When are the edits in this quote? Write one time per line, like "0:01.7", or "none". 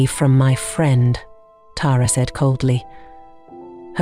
none